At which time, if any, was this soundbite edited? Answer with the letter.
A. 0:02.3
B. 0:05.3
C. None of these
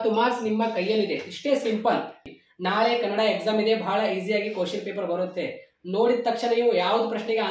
A